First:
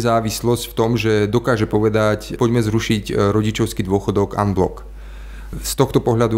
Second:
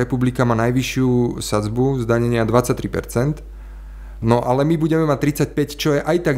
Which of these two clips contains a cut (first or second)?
first